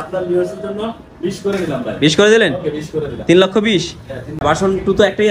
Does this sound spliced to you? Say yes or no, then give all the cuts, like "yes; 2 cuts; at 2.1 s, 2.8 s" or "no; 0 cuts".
yes; 1 cut; at 3.9 s